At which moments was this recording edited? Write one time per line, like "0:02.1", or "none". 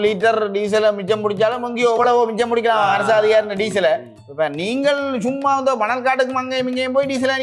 none